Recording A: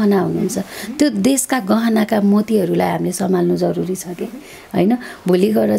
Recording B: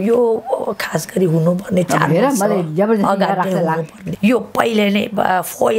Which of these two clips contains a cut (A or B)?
B